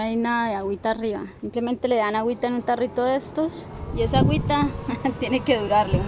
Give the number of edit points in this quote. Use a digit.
0